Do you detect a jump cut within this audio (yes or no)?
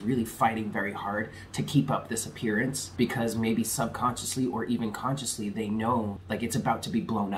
yes